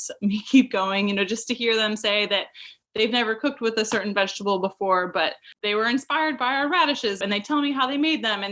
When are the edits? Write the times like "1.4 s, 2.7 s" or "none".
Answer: 5.5 s, 7.2 s